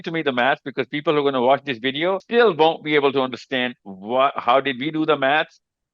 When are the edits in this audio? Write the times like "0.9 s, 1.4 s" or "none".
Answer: 2.2 s